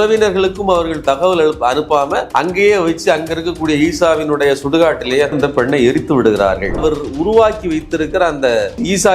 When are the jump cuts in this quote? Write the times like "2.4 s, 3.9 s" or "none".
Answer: 2.3 s, 6.8 s